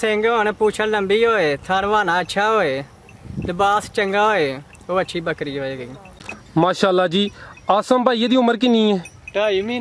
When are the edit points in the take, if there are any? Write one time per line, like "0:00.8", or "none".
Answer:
0:06.2

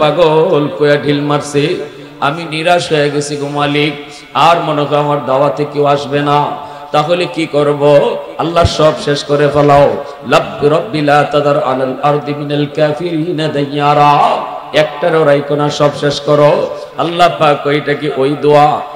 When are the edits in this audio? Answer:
none

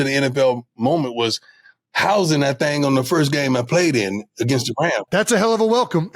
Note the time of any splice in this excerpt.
none

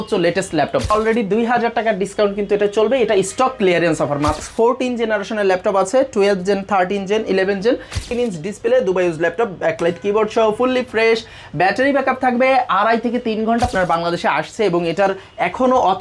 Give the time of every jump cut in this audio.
0:00.9
0:04.4
0:08.1
0:13.7

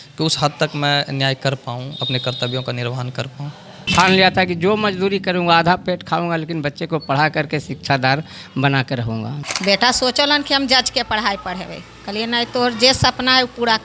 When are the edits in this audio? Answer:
0:03.9
0:09.4

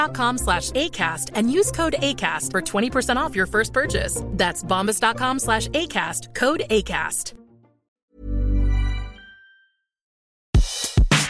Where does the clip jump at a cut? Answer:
0:10.3

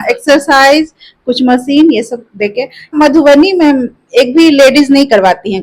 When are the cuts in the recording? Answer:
0:02.9

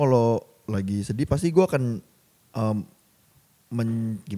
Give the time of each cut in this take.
none

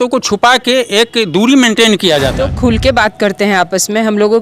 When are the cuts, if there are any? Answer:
0:02.5

